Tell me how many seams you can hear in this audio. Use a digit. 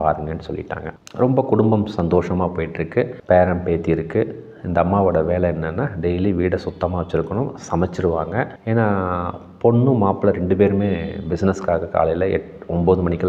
0